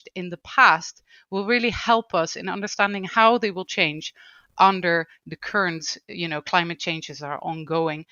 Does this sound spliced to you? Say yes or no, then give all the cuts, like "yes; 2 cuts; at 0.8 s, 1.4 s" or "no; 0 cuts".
no; 0 cuts